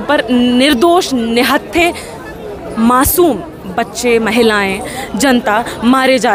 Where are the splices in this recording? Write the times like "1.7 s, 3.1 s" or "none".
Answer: none